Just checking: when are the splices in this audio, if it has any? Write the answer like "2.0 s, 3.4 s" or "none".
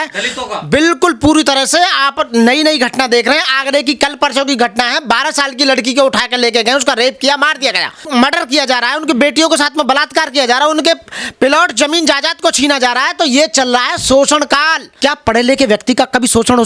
7.9 s, 14.9 s